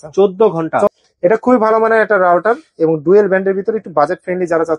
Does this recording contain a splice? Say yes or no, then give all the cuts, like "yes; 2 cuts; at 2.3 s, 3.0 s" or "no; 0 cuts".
yes; 1 cut; at 0.9 s